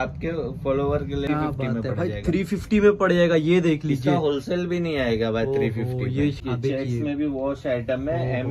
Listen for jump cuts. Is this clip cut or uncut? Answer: cut